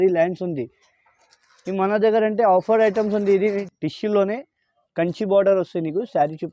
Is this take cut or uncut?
cut